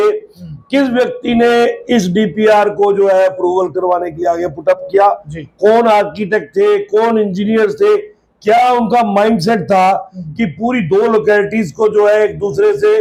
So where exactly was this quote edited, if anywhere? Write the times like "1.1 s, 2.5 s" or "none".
none

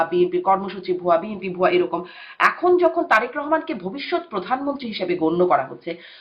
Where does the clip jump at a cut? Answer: none

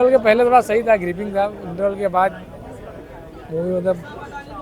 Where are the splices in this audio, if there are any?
none

